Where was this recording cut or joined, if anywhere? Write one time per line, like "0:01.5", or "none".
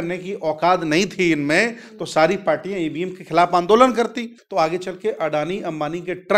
0:04.4